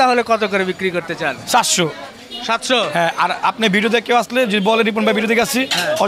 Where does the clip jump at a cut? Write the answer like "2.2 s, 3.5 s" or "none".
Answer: none